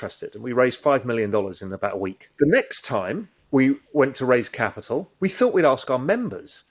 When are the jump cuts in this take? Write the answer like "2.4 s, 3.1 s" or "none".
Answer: 2.2 s, 3.3 s, 5.1 s